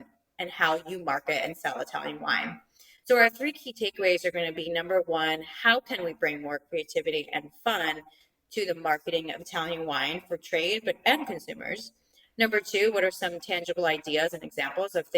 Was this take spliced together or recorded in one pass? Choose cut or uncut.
uncut